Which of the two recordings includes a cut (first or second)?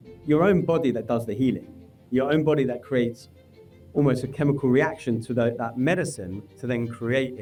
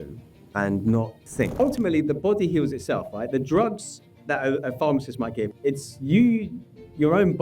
second